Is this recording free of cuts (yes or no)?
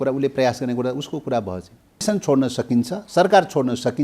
no